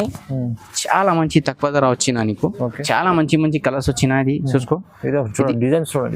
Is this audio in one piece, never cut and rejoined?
no; 1 cut; at 2.8 s

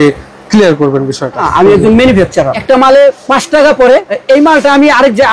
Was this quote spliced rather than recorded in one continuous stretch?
yes; 4 cuts; at 1.5 s, 2.6 s, 3.2 s, 4.1 s

